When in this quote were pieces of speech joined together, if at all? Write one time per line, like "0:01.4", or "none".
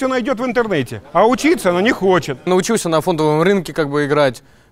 0:02.5